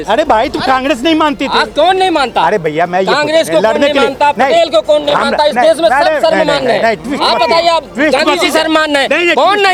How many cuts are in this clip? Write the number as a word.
zero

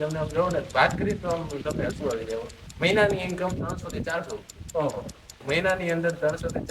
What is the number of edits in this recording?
two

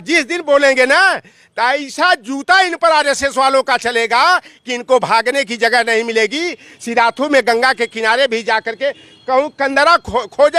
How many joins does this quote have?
zero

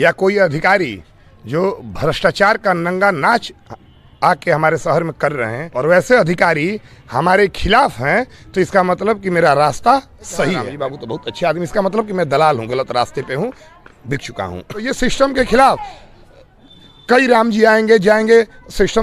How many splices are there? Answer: three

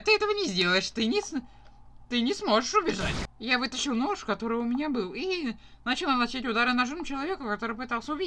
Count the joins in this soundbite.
one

